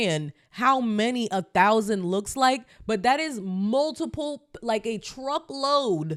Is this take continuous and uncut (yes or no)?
yes